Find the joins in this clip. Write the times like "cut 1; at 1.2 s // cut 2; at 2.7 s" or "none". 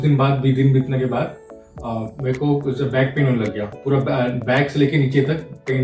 cut 1; at 3.7 s